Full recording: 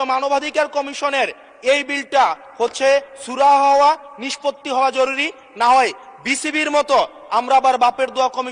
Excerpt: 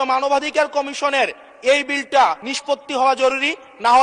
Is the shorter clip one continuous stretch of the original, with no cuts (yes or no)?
no